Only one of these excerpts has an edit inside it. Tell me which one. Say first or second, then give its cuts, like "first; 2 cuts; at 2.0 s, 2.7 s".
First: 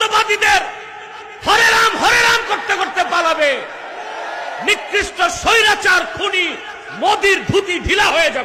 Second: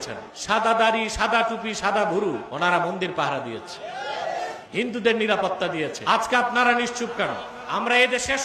second; 1 cut; at 7.4 s